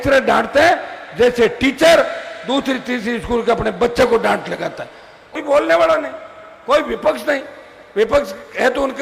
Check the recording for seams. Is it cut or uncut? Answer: cut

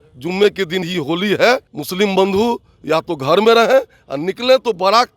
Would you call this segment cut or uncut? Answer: cut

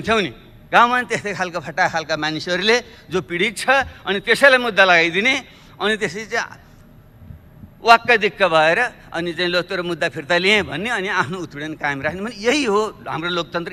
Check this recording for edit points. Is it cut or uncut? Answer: uncut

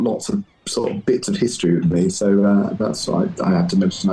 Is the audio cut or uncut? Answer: uncut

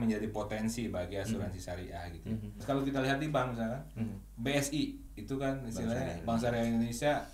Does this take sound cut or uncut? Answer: cut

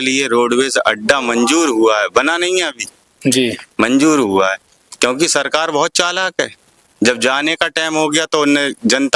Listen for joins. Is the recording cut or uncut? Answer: uncut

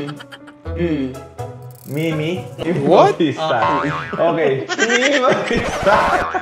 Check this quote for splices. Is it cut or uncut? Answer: cut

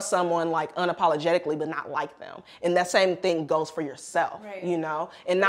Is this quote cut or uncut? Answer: uncut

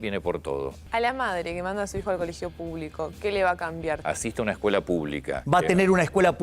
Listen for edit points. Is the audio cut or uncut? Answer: cut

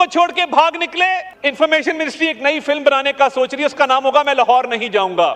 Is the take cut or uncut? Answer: cut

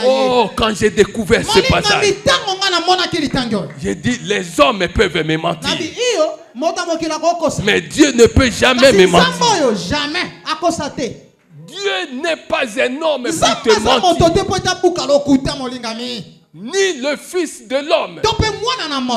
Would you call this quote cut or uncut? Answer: uncut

